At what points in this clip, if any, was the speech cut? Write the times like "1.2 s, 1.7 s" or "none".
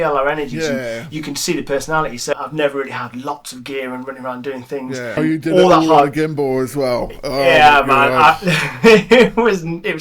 2.3 s, 5.2 s